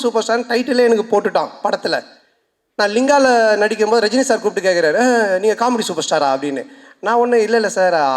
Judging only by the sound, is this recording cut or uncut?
uncut